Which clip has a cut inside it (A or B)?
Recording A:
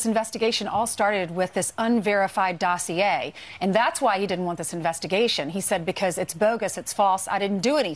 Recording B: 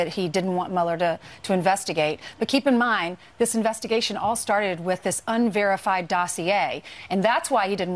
B